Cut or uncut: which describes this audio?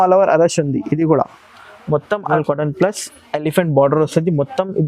cut